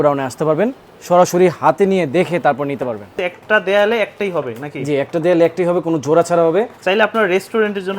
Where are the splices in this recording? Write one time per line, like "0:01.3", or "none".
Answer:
0:03.1
0:06.8